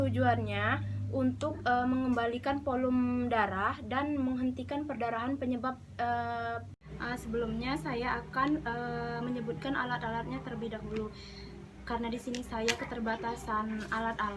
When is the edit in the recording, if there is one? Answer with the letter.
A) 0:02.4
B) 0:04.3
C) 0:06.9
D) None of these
C